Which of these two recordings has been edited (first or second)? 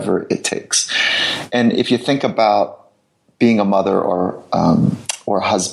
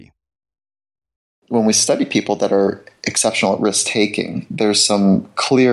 second